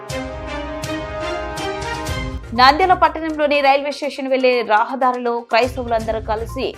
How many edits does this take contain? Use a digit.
1